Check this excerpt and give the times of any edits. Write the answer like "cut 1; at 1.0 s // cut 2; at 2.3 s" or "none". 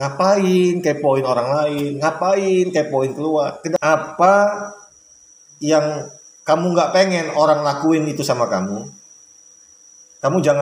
cut 1; at 3.8 s